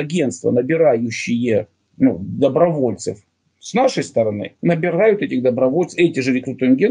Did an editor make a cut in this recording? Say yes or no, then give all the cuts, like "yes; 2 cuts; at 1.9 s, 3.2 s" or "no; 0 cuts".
no; 0 cuts